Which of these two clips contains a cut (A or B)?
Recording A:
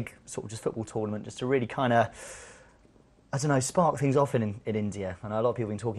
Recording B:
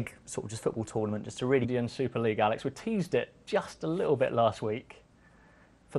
A